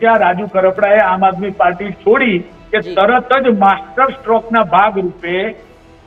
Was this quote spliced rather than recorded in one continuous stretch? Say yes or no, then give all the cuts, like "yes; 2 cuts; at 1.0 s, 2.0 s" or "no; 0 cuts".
no; 0 cuts